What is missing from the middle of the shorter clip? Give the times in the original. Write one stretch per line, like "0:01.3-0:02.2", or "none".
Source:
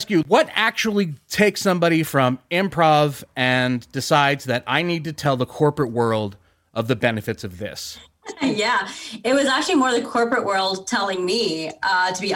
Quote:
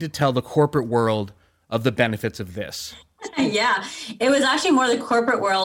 none